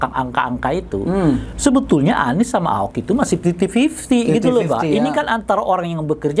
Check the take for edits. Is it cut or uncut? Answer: uncut